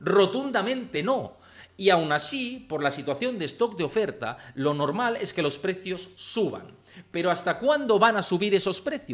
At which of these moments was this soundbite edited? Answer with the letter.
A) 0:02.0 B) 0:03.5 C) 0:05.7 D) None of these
D